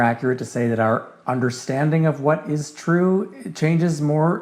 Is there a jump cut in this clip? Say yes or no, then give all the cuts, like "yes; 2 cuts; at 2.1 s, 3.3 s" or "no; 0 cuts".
no; 0 cuts